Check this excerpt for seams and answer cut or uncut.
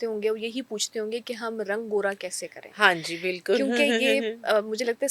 uncut